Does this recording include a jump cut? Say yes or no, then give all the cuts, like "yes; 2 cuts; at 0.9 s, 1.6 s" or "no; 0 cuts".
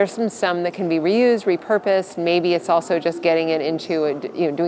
no; 0 cuts